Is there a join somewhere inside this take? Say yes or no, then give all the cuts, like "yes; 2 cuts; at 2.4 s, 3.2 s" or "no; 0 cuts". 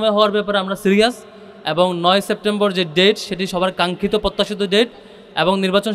no; 0 cuts